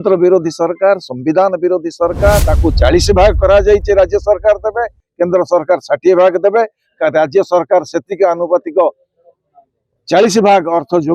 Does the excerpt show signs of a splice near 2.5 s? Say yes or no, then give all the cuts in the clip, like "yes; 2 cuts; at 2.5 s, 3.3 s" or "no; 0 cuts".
yes; 1 cut; at 2.5 s